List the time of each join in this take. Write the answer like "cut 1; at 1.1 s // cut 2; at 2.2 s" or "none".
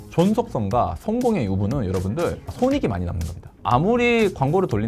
cut 1; at 3.6 s